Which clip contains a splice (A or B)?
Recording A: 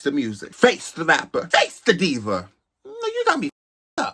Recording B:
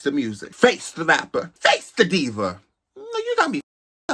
A